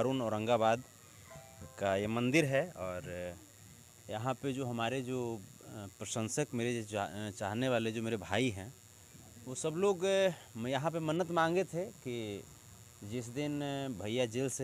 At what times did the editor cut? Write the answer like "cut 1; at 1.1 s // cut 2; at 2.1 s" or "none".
none